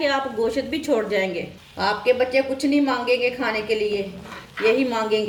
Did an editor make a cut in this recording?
no; 0 cuts

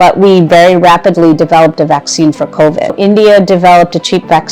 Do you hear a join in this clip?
yes; 1 cut; at 3.0 s

